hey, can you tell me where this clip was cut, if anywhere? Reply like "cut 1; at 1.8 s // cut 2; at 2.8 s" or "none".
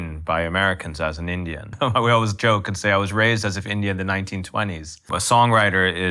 cut 1; at 1.7 s // cut 2; at 5.0 s